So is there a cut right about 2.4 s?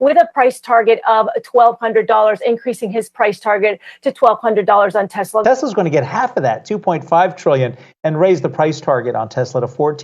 no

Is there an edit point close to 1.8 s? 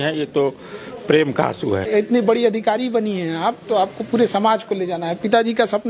yes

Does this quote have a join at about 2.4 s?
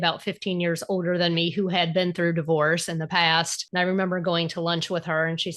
no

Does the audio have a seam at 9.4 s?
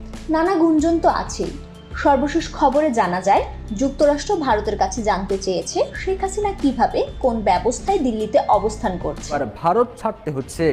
yes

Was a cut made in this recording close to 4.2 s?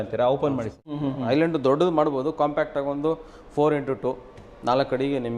no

